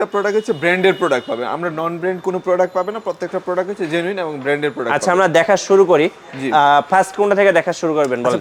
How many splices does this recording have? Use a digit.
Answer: 0